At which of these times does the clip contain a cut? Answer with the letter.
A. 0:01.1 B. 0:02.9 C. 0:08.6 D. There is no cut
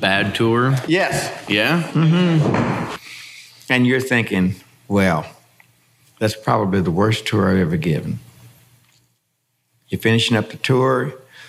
B